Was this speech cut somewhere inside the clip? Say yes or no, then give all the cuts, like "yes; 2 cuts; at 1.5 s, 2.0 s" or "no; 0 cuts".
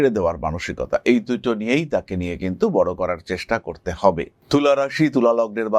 yes; 1 cut; at 4.4 s